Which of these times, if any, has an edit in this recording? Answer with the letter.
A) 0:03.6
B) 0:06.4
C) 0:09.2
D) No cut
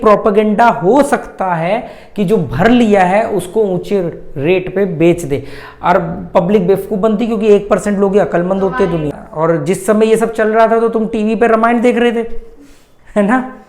C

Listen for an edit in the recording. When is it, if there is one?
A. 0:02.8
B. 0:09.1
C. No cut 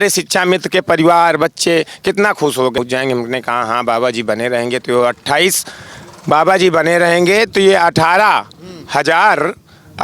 A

